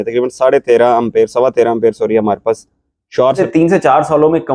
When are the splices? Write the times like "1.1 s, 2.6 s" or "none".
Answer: 3.4 s